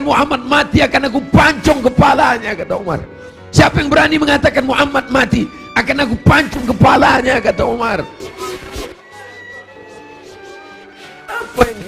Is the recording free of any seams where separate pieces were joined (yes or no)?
no